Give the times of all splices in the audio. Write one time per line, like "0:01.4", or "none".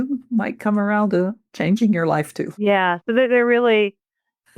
0:02.4